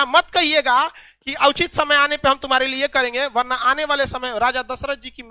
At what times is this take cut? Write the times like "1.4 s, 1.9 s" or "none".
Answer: none